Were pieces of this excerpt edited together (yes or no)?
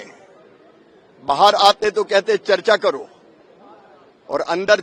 no